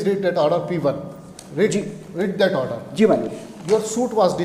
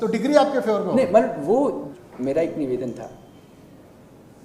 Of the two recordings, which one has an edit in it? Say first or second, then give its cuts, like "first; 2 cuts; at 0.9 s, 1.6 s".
second; 1 cut; at 1.9 s